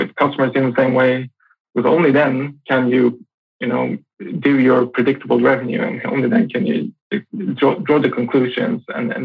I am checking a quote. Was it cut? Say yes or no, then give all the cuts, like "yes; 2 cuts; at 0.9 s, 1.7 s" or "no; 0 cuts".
no; 0 cuts